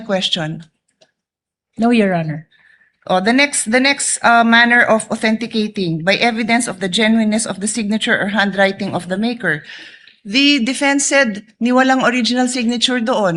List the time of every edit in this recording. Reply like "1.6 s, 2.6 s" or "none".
none